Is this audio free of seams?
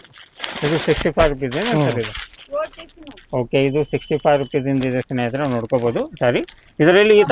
yes; 0 cuts

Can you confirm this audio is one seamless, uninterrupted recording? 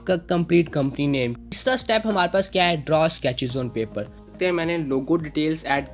no; 2 cuts; at 1.5 s, 4.3 s

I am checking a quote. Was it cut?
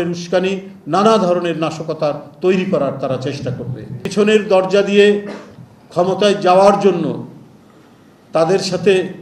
yes; 1 cut; at 4.1 s

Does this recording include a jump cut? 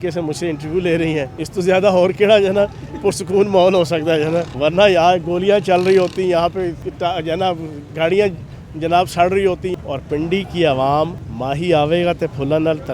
yes; 5 cuts; at 1.4 s, 4.5 s, 6.8 s, 9.7 s, 11.3 s

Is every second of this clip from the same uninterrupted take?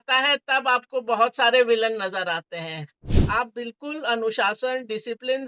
no; 1 cut; at 3.1 s

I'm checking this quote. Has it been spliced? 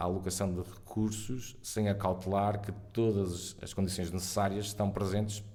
no; 0 cuts

